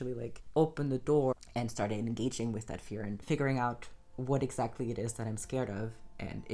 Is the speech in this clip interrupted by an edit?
yes; 1 cut; at 1.3 s

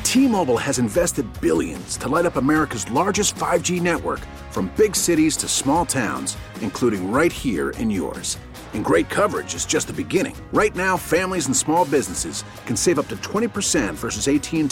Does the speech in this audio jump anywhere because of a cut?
no; 0 cuts

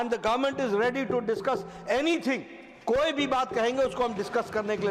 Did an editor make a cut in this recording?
no; 0 cuts

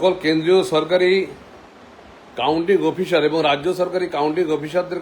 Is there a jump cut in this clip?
yes; 1 cut; at 1.2 s

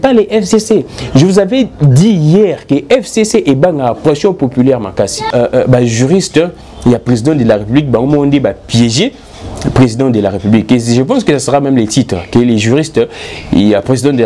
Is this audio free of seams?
no; 1 cut; at 5.3 s

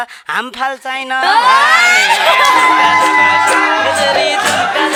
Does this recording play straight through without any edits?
yes; 0 cuts

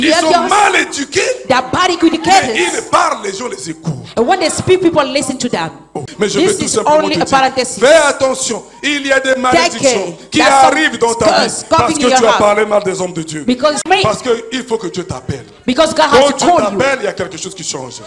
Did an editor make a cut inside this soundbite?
yes; 2 cuts; at 6.0 s, 13.8 s

